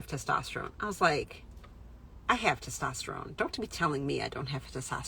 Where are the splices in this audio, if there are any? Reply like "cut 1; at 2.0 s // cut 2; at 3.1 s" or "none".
none